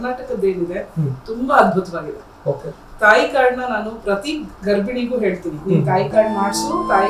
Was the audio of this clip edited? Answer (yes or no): no